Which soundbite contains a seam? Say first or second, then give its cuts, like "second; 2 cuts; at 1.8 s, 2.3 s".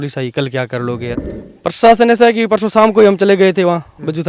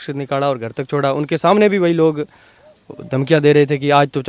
first; 1 cut; at 1.1 s